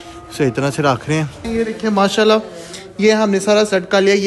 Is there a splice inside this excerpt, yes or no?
yes